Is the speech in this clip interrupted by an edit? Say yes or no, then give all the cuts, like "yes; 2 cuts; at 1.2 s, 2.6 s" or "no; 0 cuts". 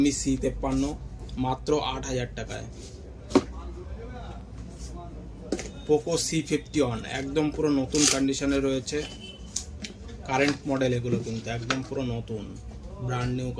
no; 0 cuts